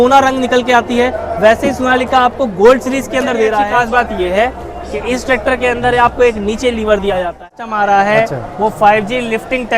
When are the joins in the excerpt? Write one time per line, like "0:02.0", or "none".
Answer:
0:03.7
0:07.4